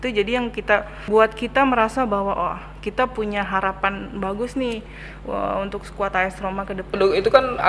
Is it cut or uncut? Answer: cut